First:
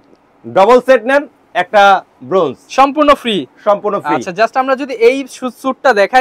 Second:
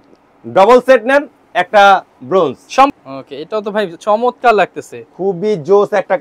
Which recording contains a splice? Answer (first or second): second